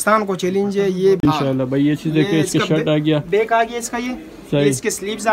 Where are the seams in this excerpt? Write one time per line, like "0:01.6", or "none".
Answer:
0:01.3